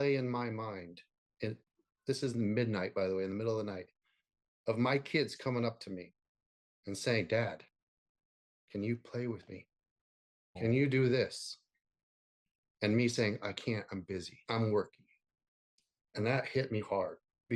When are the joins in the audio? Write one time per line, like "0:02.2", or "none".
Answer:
0:10.5
0:14.3